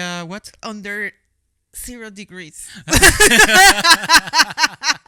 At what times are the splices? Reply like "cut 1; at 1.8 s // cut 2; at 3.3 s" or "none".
none